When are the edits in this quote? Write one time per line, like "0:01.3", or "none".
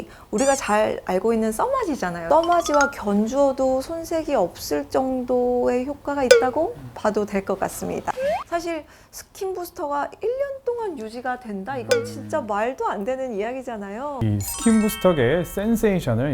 0:02.1
0:08.1
0:14.1